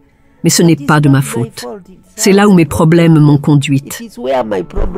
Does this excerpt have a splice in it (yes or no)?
yes